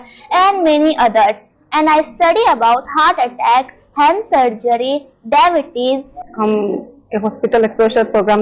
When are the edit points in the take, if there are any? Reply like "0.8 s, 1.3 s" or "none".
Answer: 6.2 s